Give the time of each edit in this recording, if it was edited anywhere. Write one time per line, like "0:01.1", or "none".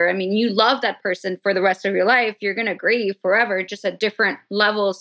none